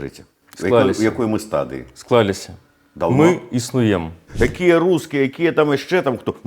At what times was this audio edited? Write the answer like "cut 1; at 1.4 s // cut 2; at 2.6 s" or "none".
cut 1; at 4.3 s